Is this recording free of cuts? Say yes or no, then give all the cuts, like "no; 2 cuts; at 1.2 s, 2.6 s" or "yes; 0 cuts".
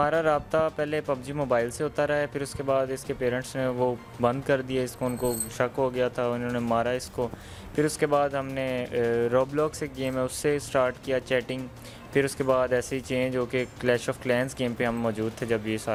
yes; 0 cuts